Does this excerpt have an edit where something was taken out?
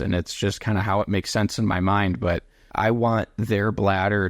yes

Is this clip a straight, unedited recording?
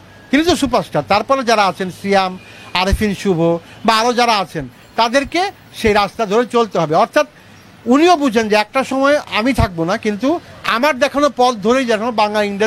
yes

